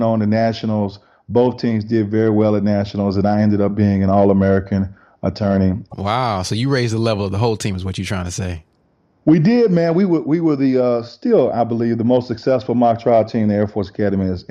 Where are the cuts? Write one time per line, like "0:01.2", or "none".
0:05.8